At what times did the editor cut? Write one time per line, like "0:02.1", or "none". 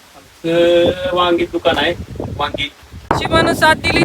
0:03.1